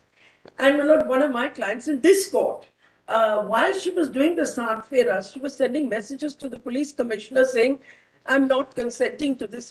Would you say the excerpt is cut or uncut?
uncut